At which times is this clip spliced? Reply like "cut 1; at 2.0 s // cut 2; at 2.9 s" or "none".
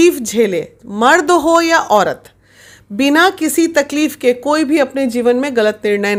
none